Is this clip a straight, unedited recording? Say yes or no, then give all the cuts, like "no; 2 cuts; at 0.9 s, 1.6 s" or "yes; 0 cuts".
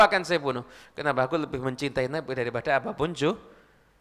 yes; 0 cuts